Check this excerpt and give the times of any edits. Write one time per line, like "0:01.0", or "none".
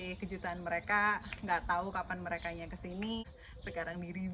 0:03.4